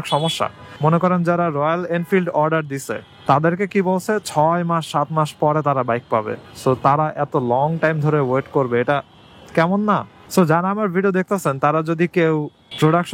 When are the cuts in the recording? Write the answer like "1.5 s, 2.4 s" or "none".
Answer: 10.1 s

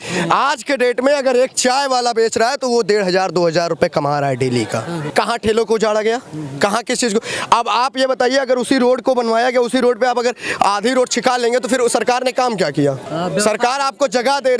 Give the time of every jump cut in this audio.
5.0 s, 13.0 s

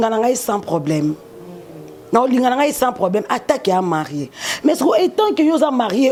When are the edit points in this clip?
none

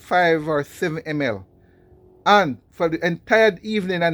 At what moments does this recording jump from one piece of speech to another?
2.6 s

